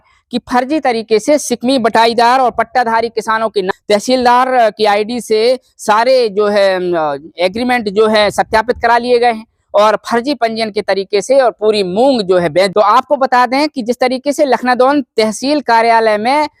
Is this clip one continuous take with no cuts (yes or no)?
yes